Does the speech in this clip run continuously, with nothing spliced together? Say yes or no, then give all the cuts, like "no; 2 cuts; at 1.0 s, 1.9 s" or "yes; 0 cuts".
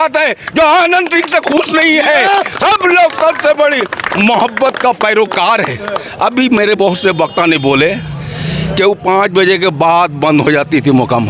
yes; 0 cuts